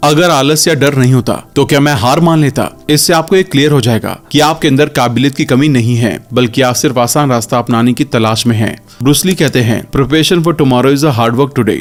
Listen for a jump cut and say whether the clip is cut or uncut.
uncut